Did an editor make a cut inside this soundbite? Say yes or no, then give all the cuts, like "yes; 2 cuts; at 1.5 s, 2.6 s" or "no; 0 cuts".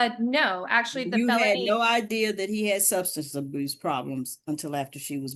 no; 0 cuts